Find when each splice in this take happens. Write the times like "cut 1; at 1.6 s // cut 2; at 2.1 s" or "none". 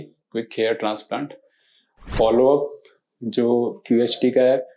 cut 1; at 2.0 s

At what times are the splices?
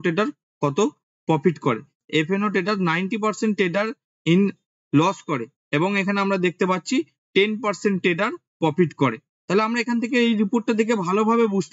cut 1; at 2.0 s

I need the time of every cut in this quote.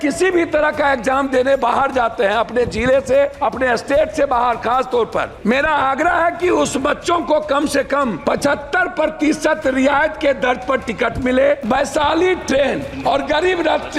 cut 1; at 3.3 s // cut 2; at 5.3 s // cut 3; at 8.2 s // cut 4; at 11.6 s // cut 5; at 12.9 s

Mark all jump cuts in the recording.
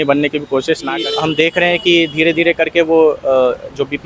cut 1; at 1.0 s

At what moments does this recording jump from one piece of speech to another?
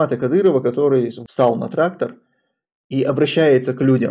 cut 1; at 1.2 s

